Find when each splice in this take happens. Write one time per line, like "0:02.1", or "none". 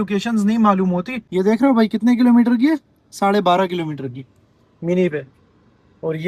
0:01.2